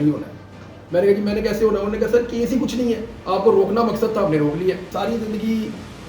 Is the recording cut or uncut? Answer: cut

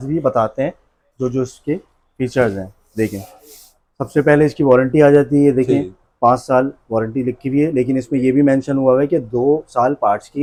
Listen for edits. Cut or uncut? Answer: uncut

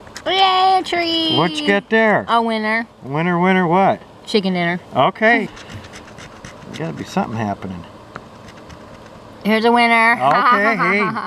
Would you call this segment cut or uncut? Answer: cut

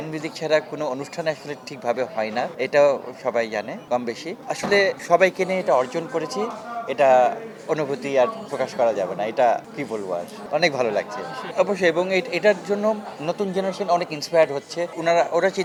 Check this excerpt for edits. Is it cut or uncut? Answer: uncut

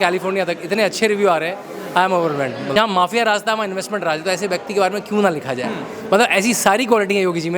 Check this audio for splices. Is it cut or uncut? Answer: cut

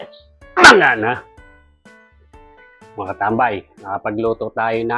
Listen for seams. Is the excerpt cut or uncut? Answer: uncut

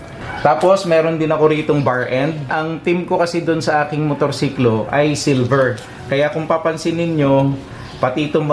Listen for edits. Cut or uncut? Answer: uncut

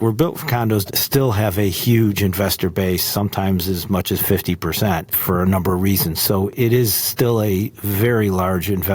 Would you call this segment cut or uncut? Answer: cut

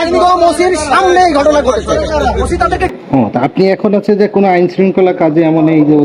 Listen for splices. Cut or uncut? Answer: cut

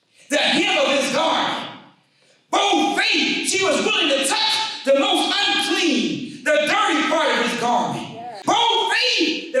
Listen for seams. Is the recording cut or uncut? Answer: cut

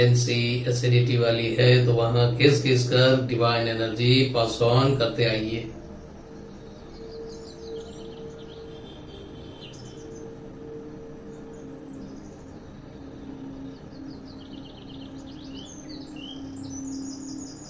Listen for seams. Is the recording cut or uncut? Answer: uncut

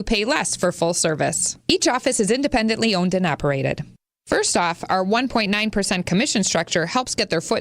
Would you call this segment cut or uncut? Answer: cut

